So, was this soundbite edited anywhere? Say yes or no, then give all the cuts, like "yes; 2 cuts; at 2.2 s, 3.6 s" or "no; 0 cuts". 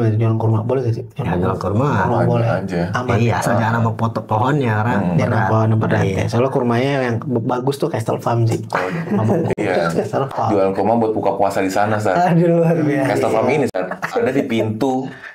no; 0 cuts